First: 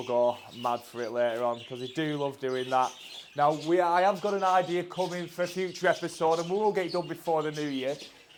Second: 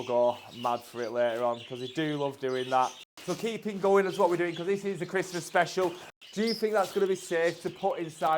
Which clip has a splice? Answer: second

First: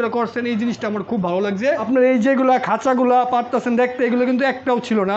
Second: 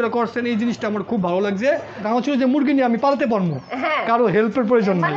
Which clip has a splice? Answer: first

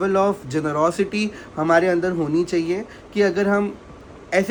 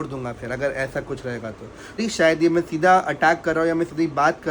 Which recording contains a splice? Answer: second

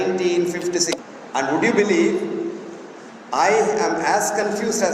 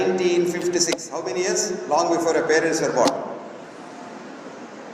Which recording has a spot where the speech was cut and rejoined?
first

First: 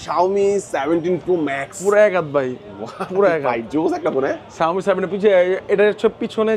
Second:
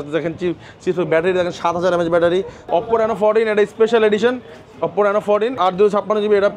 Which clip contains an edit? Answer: second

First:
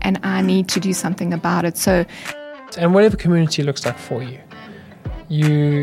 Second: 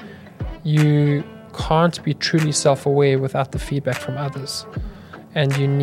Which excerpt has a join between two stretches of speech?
first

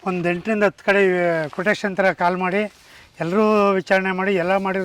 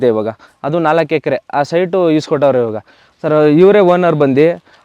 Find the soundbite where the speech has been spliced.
second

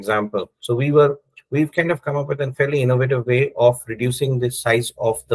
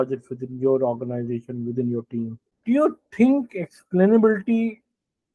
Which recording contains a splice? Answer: second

